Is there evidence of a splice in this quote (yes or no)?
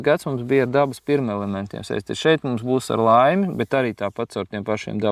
no